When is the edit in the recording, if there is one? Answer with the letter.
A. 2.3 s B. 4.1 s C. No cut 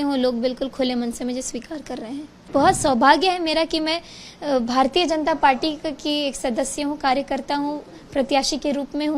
A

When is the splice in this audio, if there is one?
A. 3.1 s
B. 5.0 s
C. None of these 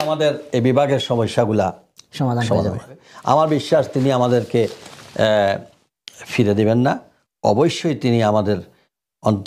A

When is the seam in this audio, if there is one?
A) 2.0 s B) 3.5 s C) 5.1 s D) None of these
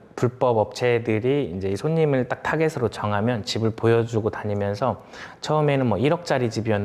D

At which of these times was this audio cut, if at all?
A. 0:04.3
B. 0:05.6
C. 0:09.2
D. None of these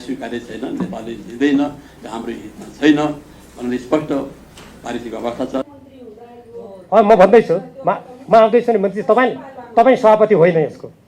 B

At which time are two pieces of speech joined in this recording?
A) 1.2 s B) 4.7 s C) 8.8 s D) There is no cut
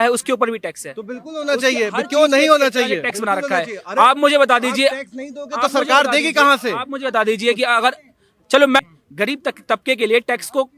C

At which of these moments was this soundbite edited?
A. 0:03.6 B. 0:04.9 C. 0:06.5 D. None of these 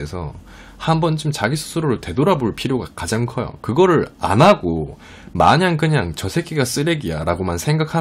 D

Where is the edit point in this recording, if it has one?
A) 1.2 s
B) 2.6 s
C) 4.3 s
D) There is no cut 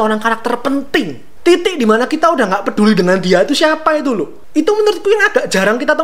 A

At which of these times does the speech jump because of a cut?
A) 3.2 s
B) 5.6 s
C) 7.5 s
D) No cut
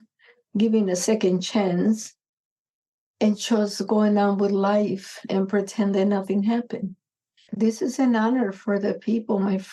C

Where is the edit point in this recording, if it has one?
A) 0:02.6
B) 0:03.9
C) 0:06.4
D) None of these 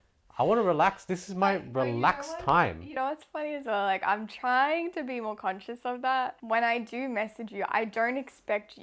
C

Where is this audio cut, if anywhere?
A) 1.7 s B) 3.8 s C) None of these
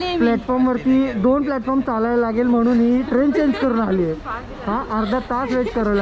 C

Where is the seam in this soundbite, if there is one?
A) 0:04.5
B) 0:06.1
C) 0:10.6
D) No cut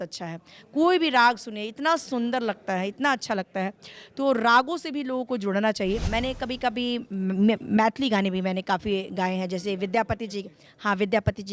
B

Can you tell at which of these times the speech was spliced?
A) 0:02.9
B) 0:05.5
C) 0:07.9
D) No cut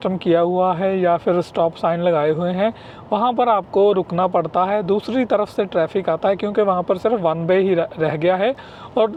D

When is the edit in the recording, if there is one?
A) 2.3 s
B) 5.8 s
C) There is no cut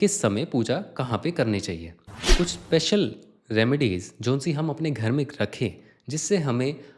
A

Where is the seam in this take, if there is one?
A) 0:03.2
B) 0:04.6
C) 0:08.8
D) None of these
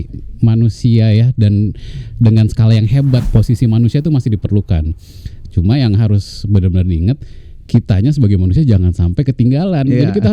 A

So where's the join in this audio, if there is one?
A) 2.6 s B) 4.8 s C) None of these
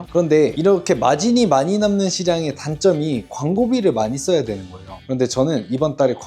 B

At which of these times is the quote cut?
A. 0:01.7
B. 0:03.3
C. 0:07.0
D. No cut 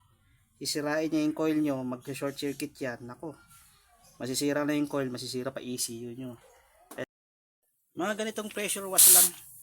C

